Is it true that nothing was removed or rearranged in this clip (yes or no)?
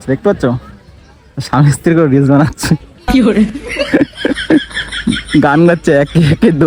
yes